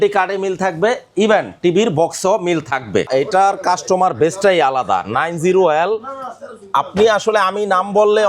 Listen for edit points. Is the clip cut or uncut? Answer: cut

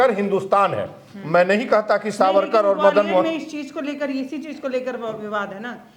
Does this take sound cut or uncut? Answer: uncut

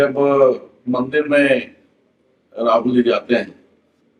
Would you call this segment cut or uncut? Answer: uncut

